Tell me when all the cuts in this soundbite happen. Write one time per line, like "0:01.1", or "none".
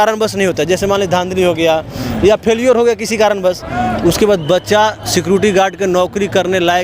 none